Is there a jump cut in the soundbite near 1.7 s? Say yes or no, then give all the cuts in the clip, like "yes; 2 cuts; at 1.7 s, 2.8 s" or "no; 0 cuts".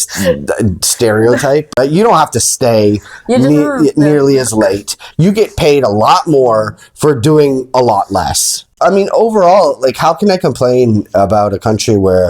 yes; 2 cuts; at 1.7 s, 8.6 s